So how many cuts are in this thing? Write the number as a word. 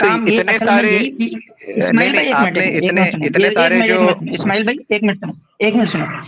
zero